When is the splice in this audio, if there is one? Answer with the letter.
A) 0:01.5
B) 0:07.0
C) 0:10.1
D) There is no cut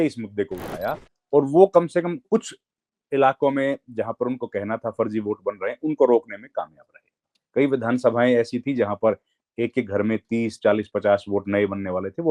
D